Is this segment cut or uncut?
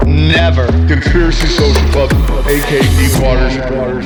uncut